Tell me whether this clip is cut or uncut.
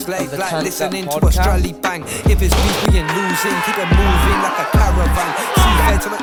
uncut